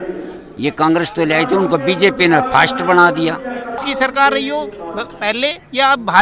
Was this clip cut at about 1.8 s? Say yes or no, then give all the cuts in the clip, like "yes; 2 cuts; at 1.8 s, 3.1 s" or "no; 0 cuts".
no; 1 cut; at 3.8 s